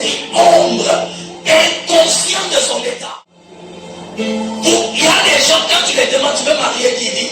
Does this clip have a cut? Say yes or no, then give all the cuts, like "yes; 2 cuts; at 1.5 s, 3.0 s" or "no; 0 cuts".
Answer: yes; 1 cut; at 3.1 s